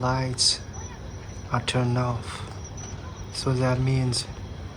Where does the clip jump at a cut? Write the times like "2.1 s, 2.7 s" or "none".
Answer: none